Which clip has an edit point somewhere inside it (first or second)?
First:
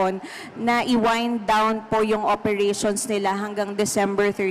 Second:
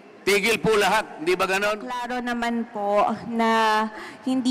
second